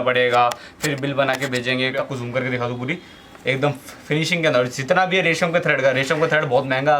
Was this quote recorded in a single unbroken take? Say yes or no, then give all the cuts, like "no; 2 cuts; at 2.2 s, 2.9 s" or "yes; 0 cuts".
no; 1 cut; at 2.0 s